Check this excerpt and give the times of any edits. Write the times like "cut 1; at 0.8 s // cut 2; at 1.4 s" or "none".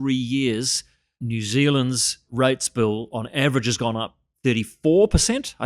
cut 1; at 1.2 s // cut 2; at 2.3 s